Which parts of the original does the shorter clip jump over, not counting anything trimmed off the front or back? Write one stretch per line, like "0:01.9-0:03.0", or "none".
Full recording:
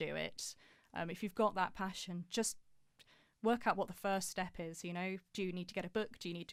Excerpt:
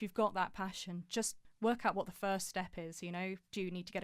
0:02.6-0:03.2